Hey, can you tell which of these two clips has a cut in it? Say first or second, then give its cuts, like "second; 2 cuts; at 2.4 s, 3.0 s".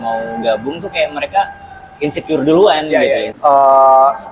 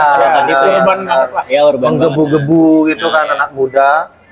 first; 1 cut; at 3.3 s